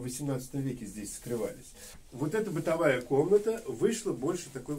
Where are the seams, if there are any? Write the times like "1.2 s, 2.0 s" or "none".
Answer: none